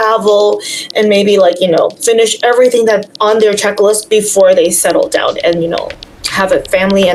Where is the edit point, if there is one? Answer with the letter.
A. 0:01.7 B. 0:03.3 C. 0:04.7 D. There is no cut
D